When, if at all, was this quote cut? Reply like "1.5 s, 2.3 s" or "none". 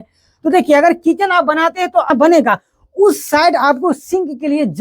2.1 s